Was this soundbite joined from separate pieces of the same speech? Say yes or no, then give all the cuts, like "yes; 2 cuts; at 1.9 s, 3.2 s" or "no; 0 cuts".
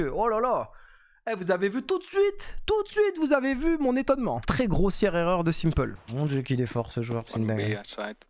yes; 2 cuts; at 4.4 s, 6.0 s